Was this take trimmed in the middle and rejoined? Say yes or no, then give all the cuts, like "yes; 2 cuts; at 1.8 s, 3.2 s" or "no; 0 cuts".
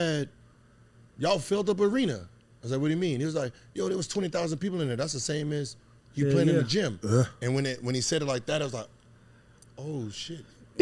no; 0 cuts